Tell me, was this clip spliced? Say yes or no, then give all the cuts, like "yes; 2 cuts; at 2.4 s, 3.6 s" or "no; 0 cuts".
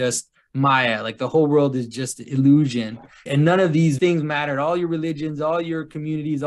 yes; 2 cuts; at 3.1 s, 4.0 s